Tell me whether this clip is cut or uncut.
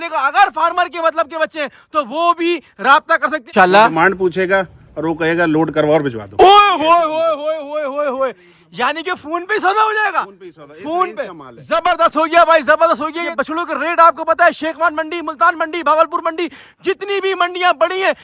cut